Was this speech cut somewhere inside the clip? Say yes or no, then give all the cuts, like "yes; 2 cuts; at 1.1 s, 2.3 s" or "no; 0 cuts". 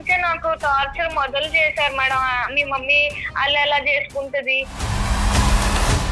yes; 1 cut; at 4.8 s